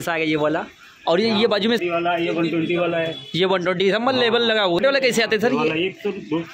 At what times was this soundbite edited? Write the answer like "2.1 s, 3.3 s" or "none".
1.8 s, 4.8 s